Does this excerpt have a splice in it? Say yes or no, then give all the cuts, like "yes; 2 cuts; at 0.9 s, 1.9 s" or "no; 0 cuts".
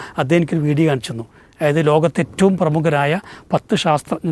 no; 0 cuts